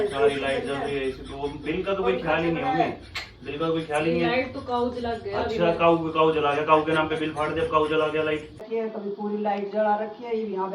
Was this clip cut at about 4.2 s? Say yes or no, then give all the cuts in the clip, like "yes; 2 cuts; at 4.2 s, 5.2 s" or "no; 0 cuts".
no; 1 cut; at 8.6 s